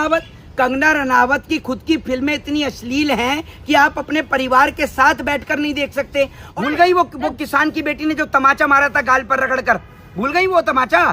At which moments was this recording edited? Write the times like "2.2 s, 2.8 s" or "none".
6.4 s